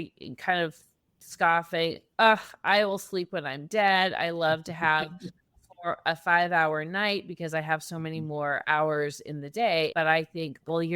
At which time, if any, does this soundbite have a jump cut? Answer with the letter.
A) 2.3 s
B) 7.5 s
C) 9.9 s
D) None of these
C